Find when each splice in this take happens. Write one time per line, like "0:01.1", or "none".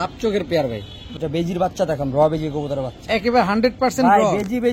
0:01.1